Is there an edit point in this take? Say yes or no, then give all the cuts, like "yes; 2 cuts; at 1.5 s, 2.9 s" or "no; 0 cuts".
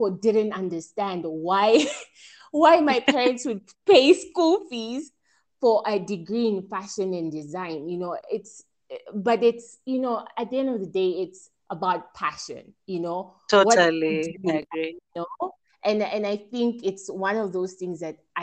no; 0 cuts